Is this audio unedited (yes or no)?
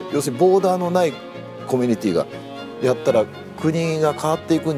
yes